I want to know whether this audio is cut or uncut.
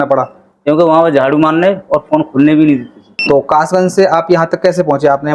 cut